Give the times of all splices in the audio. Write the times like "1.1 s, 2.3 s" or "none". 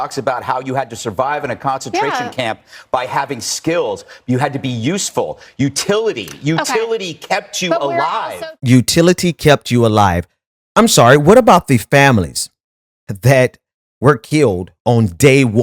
none